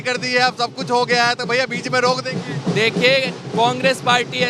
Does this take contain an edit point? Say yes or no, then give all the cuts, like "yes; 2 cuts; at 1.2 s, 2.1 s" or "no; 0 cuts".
no; 0 cuts